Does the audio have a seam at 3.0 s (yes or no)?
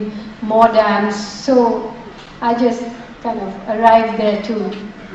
yes